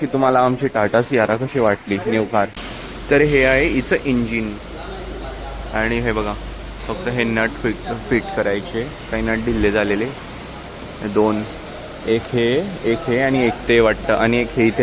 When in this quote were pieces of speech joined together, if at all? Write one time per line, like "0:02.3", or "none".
none